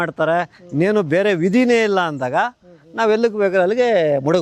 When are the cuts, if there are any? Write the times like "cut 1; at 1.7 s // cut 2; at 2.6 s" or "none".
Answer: none